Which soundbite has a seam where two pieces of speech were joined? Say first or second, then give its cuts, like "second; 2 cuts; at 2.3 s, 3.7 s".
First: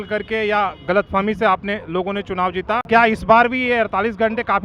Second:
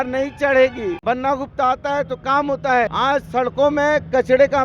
second; 2 cuts; at 1.0 s, 2.9 s